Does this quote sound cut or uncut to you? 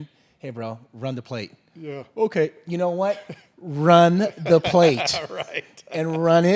uncut